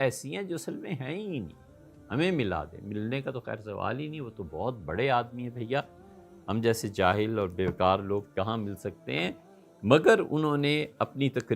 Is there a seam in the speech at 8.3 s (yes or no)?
no